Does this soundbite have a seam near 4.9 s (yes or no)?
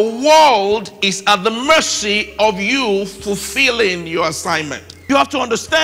yes